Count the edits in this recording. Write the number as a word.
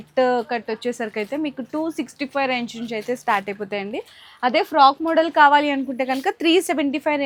zero